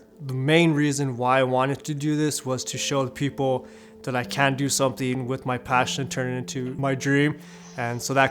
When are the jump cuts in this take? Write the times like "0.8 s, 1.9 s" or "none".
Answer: 6.8 s